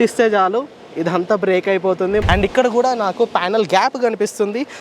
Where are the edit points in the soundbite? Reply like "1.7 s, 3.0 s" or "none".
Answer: 2.2 s